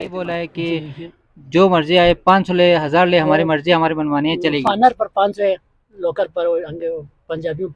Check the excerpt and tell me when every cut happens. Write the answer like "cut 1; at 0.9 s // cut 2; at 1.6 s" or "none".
none